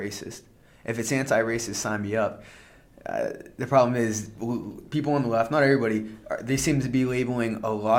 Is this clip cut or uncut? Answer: uncut